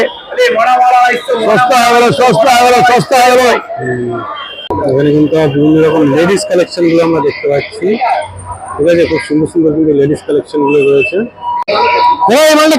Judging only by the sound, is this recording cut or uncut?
cut